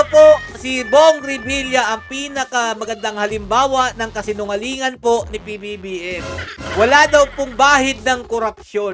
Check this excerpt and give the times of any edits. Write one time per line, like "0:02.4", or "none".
none